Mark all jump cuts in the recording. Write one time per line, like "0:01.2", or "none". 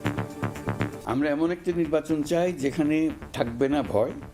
0:00.9